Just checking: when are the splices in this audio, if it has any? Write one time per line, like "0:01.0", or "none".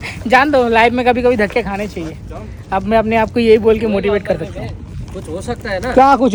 none